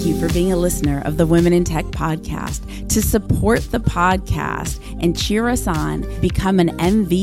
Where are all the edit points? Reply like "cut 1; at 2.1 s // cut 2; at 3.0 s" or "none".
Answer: none